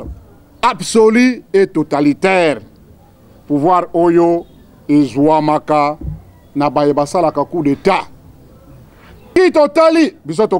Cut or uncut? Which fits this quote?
cut